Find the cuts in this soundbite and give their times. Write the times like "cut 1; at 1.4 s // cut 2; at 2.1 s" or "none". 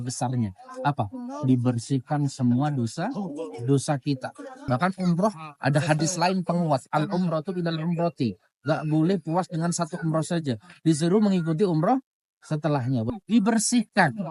cut 1; at 4.6 s // cut 2; at 13.1 s